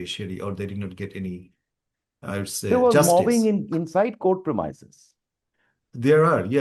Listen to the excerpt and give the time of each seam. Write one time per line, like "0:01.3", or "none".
none